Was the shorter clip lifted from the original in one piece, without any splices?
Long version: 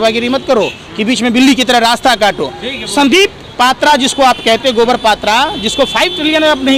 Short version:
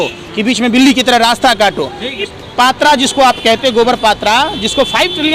no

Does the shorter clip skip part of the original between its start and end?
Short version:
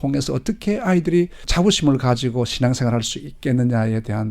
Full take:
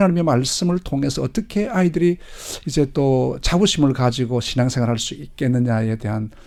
yes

